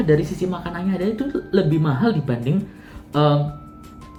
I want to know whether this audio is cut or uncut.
uncut